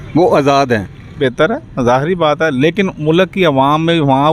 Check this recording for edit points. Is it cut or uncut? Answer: cut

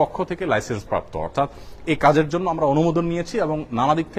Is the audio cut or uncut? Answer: uncut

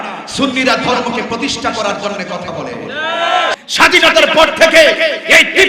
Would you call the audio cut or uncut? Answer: cut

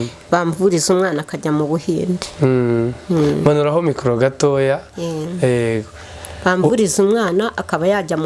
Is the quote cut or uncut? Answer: uncut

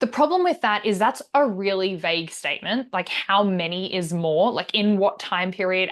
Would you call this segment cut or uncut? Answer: uncut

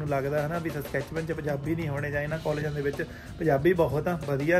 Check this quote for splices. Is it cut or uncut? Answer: uncut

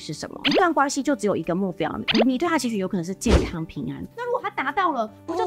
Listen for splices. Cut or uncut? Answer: uncut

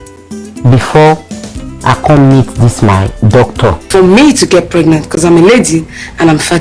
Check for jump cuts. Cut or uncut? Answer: cut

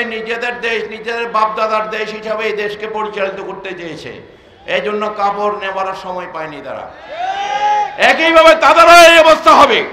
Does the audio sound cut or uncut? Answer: uncut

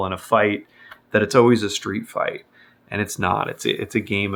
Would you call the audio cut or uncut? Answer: uncut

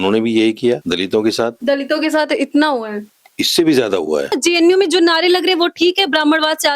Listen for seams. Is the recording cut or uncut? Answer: cut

